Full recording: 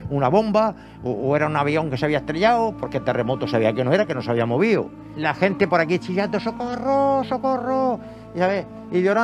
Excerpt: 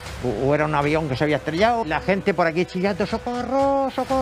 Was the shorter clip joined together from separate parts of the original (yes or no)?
yes